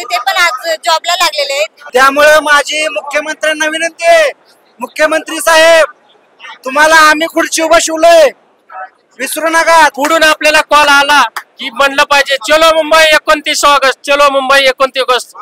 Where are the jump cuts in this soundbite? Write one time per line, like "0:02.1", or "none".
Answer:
0:01.8
0:09.9